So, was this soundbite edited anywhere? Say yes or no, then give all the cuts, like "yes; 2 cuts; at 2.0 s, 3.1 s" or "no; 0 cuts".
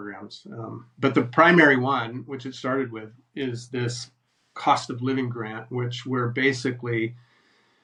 no; 0 cuts